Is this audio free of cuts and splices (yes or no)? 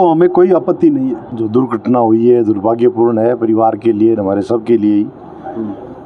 yes